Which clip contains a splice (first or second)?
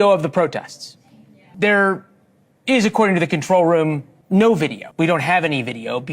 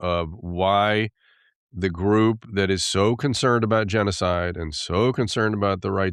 first